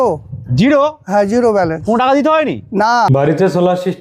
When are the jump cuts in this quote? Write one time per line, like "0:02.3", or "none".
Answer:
0:03.1